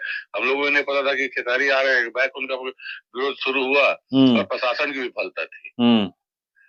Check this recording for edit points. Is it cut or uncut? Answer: uncut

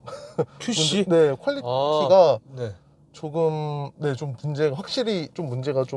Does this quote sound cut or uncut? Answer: uncut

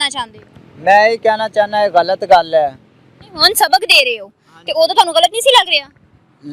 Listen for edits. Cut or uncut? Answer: uncut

